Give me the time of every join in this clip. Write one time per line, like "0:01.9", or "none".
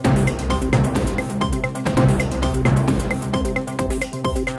0:02.0